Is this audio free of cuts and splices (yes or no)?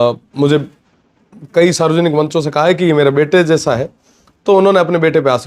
yes